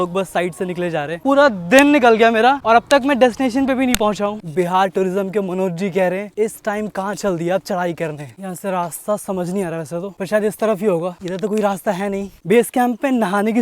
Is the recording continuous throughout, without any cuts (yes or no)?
no